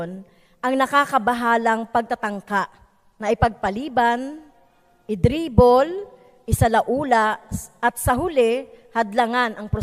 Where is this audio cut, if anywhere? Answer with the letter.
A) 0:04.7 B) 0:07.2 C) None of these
C